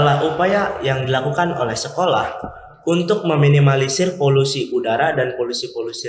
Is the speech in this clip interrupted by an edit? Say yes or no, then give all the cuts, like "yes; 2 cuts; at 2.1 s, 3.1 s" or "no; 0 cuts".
no; 0 cuts